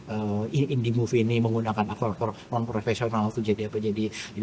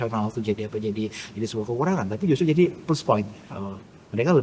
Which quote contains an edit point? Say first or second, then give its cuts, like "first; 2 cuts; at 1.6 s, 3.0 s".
second; 1 cut; at 3.4 s